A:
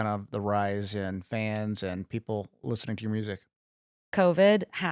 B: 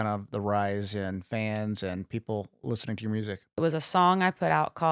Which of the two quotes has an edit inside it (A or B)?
B